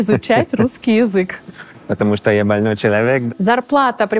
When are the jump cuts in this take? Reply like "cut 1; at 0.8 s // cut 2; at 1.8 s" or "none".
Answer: cut 1; at 3.2 s